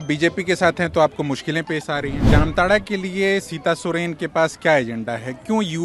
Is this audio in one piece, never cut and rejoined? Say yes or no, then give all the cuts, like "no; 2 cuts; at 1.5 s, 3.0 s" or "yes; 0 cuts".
no; 1 cut; at 2.3 s